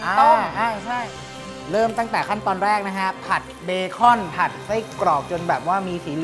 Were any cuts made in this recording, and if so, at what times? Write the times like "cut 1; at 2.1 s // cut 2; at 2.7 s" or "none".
cut 1; at 1.0 s